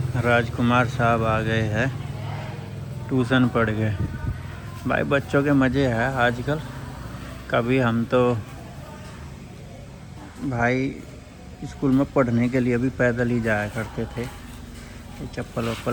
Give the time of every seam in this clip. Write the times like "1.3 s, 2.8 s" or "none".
none